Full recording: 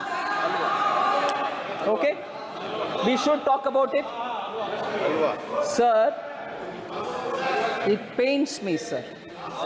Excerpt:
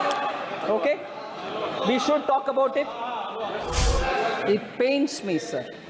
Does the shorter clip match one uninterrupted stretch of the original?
no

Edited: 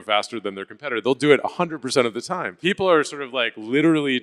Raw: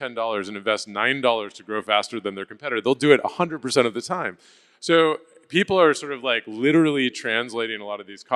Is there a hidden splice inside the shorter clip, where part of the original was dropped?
yes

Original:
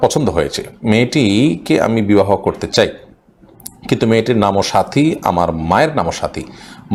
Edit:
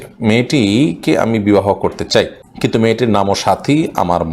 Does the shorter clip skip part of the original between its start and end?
yes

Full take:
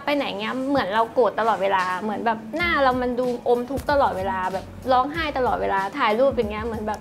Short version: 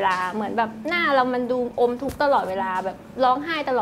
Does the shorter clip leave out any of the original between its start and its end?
no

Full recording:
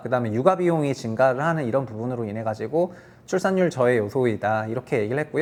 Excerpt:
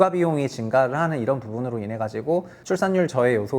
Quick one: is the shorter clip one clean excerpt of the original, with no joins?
no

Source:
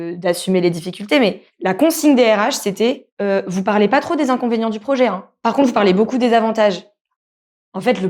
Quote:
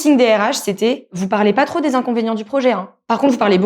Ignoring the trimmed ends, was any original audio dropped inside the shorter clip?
yes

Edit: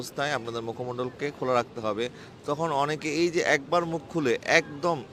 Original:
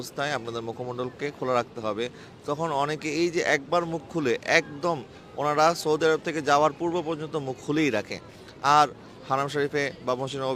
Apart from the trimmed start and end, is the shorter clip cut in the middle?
no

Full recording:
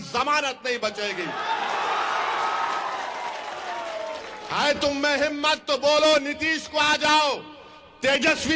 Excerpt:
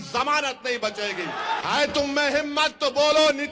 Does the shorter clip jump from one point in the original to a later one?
yes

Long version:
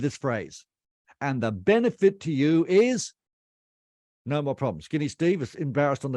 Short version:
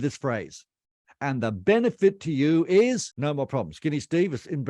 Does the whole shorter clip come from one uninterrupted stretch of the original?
no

